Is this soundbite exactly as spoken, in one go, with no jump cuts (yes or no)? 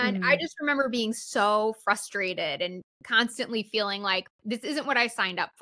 no